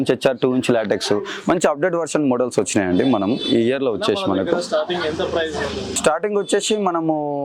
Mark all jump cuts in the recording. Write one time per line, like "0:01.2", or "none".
none